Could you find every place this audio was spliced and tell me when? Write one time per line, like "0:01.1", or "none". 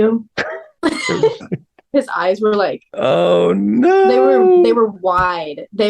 0:01.9